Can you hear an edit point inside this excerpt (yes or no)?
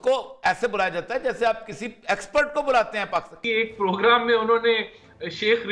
yes